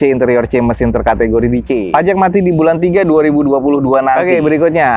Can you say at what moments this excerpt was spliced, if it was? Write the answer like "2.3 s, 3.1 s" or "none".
1.9 s, 4.2 s